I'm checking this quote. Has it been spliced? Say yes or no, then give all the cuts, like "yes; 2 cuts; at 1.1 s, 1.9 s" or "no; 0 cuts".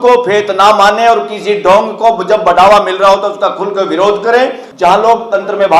yes; 1 cut; at 4.6 s